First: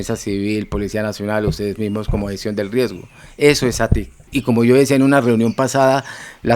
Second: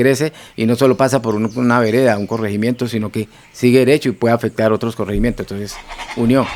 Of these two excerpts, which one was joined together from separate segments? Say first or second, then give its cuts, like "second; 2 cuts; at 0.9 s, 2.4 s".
first; 1 cut; at 4.3 s